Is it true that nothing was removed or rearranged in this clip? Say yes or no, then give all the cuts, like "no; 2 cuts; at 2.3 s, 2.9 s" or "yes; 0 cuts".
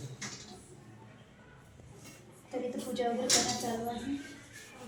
yes; 0 cuts